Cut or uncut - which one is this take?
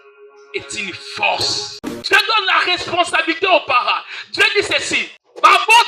cut